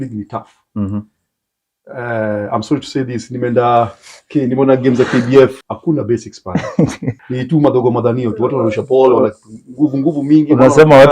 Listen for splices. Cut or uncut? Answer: cut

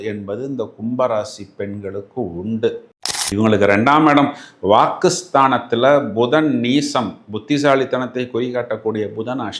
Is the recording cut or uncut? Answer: cut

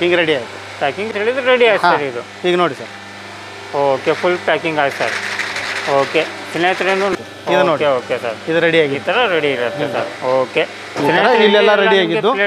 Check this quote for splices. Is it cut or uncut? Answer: cut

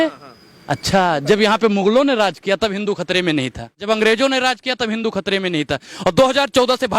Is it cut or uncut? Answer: cut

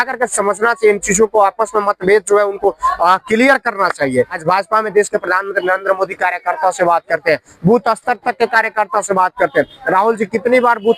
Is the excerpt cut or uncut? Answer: cut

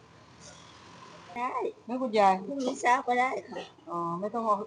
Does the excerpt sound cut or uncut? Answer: cut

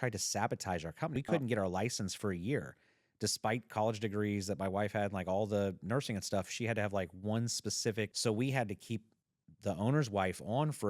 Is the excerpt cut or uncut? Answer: cut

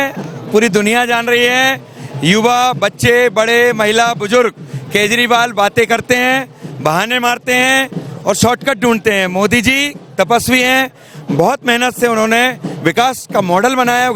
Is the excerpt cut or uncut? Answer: uncut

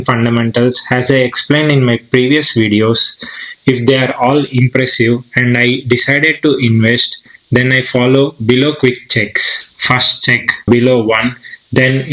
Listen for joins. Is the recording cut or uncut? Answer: cut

